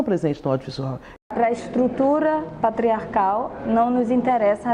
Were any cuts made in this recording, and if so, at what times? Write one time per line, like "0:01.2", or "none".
0:01.3